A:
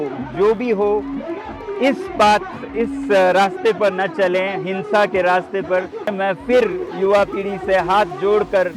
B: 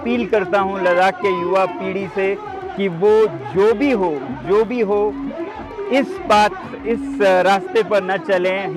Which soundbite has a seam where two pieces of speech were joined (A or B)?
A